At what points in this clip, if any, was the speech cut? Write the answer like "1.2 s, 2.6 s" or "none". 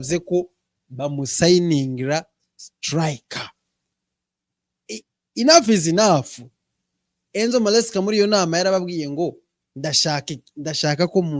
none